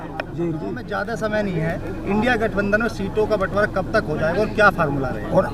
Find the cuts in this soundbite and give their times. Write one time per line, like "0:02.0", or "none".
0:01.0